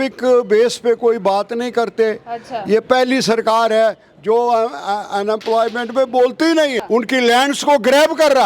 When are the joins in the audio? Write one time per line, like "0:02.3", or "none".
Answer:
0:06.8